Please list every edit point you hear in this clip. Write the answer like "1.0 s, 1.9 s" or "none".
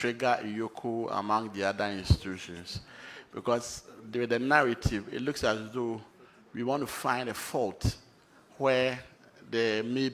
none